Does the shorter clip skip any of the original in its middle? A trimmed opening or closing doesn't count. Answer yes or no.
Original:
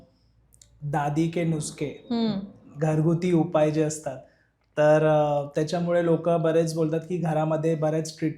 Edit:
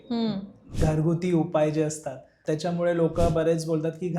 yes